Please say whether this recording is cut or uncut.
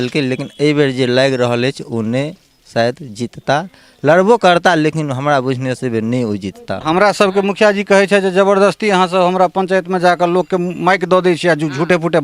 cut